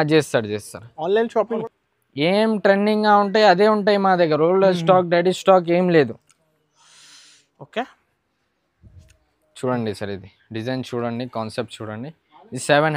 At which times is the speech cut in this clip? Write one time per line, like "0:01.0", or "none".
0:01.6